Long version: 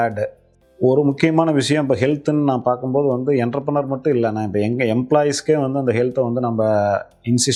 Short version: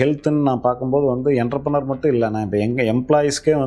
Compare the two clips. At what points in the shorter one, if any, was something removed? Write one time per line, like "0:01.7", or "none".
none